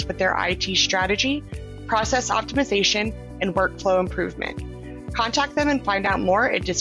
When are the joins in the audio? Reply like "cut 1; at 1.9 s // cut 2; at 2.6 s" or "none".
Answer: none